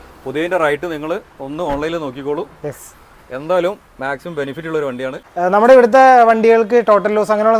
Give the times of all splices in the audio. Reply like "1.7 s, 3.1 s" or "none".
5.2 s